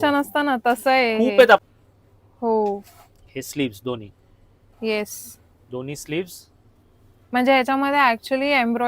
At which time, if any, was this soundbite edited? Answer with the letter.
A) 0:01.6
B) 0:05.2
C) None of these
A